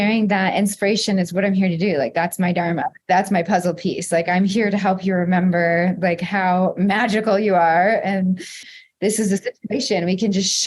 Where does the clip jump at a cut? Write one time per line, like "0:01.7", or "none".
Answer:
0:08.7